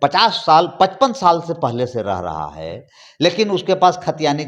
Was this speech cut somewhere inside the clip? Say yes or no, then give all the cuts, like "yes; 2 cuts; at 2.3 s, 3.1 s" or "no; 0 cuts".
no; 0 cuts